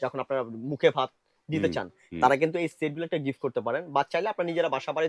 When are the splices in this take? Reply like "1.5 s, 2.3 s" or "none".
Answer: none